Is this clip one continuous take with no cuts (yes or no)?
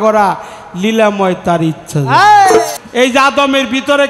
no